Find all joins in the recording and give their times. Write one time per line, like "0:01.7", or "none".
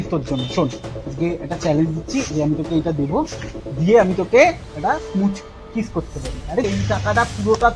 0:06.7